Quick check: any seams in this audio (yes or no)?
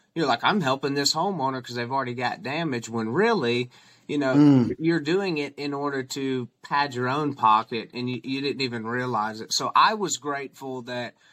no